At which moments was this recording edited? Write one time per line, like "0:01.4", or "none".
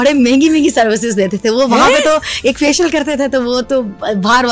none